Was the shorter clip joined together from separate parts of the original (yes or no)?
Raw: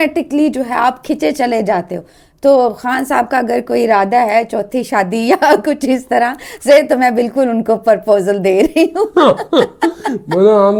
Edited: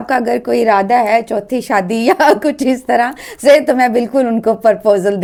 no